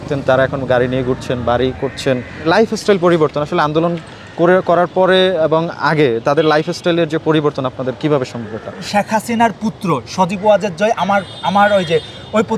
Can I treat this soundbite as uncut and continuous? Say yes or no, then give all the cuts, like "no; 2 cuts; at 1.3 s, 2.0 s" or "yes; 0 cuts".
no; 2 cuts; at 2.3 s, 8.9 s